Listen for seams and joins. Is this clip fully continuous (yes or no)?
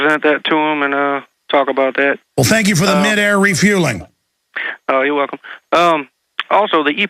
no